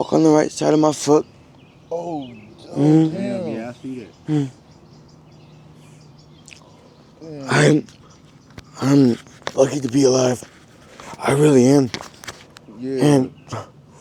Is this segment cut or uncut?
uncut